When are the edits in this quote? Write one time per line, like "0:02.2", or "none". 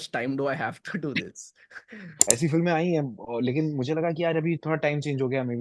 0:02.1